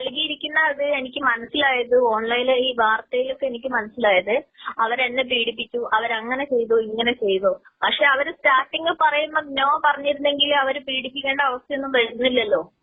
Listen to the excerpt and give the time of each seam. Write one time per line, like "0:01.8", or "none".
none